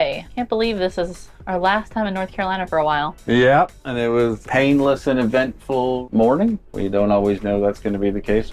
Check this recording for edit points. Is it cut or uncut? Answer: uncut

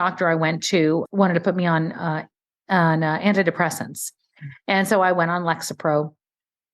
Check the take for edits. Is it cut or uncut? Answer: cut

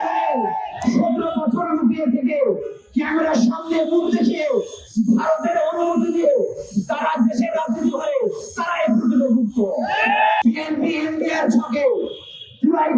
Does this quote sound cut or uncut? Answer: cut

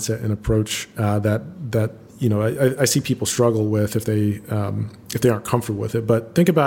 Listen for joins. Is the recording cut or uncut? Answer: uncut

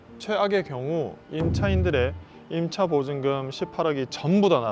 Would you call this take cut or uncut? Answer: uncut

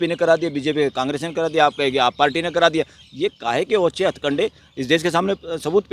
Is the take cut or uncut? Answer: uncut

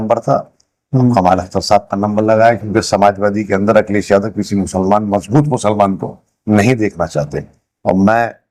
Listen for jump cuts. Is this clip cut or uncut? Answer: uncut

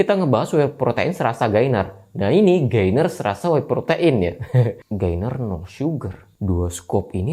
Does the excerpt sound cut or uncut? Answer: cut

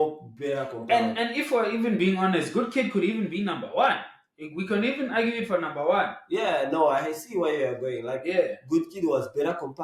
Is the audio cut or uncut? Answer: uncut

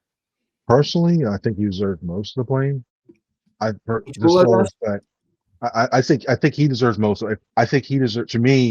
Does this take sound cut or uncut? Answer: cut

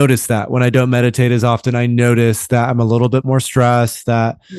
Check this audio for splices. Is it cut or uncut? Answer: uncut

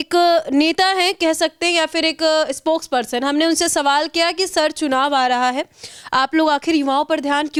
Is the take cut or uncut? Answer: uncut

